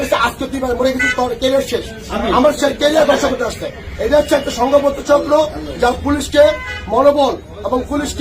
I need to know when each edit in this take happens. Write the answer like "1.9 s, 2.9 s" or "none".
none